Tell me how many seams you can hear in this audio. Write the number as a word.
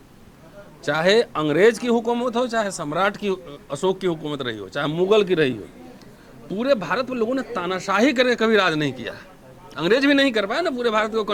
zero